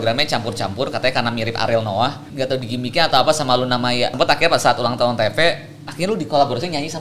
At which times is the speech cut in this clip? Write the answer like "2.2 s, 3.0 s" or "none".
2.2 s, 4.1 s

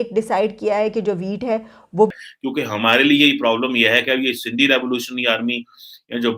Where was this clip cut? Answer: 2.2 s

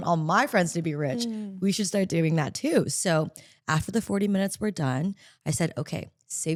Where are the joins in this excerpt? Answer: none

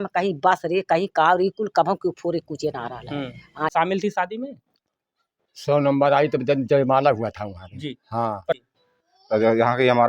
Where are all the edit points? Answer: 3.7 s, 8.6 s

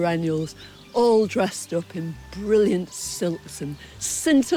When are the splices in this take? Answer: none

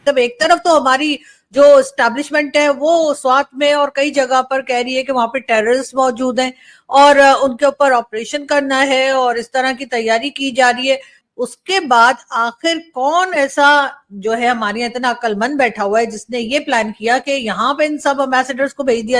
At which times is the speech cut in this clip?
11.1 s

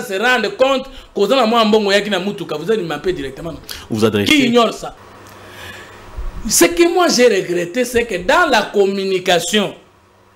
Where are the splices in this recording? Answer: 5.1 s

